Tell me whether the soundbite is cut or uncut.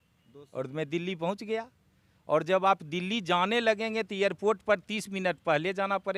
uncut